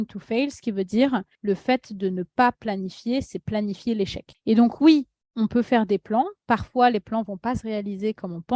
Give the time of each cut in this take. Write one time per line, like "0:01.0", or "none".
0:01.3
0:04.2